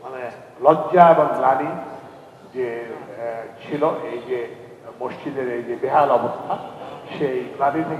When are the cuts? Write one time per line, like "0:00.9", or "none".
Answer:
none